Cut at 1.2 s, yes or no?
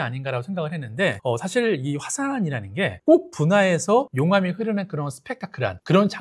no